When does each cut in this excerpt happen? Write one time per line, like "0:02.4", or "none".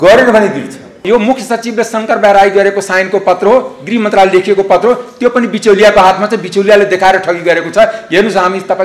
0:01.0